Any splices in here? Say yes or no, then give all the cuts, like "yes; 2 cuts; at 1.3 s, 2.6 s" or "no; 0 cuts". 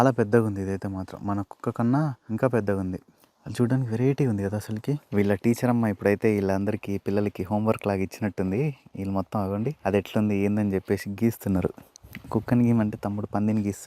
yes; 3 cuts; at 2.2 s, 5.0 s, 9.8 s